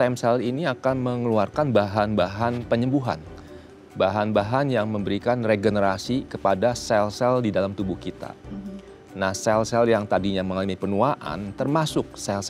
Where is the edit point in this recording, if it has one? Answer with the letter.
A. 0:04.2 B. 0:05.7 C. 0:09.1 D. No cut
D